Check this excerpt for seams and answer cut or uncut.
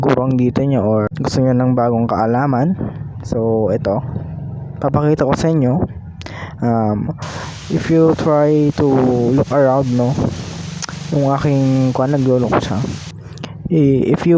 cut